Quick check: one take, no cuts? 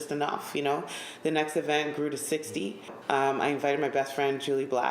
no; 1 cut; at 2.9 s

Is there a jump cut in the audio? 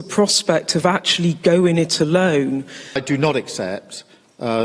yes; 1 cut; at 3.0 s

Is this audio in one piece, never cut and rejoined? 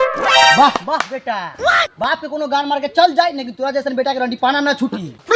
yes; 0 cuts

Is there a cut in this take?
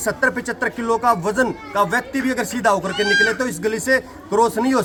no; 0 cuts

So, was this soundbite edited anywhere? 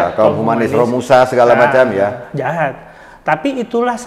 no; 0 cuts

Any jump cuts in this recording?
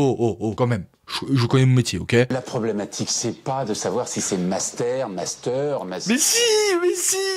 yes; 1 cut; at 2.3 s

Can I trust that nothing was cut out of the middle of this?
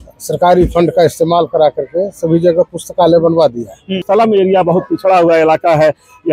no; 1 cut; at 4.0 s

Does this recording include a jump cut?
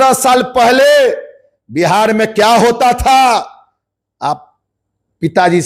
no; 0 cuts

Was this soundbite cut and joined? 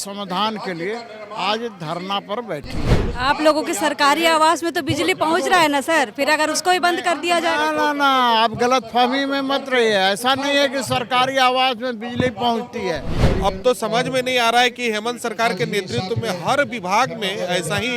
yes; 2 cuts; at 2.7 s, 13.2 s

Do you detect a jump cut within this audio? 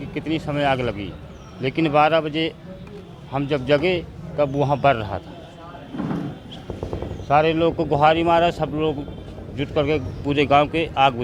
no; 0 cuts

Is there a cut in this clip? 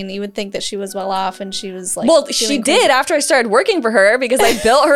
no; 0 cuts

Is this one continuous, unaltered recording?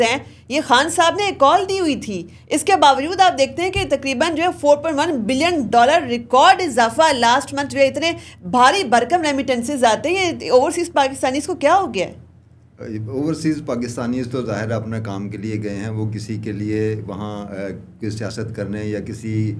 yes; 0 cuts

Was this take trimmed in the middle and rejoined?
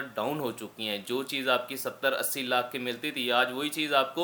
no; 0 cuts

